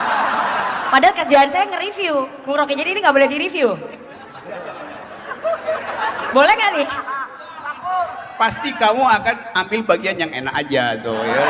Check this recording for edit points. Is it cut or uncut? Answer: uncut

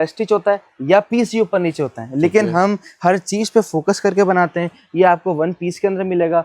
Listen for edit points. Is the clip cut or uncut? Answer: uncut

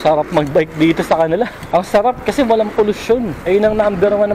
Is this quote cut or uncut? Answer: cut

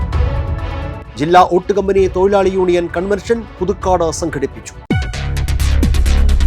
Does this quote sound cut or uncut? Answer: cut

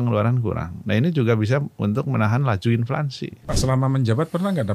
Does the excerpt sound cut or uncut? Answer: cut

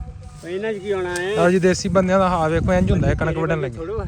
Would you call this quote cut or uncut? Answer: uncut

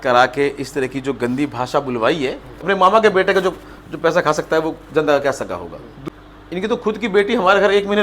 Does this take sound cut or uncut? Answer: cut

